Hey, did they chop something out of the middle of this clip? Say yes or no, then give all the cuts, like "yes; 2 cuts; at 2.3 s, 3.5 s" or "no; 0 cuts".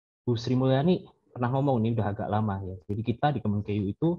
no; 0 cuts